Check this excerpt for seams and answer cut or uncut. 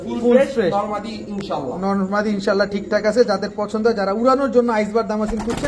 uncut